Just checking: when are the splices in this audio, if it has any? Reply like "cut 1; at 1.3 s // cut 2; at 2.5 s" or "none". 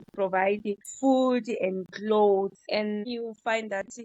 cut 1; at 0.9 s // cut 2; at 3.0 s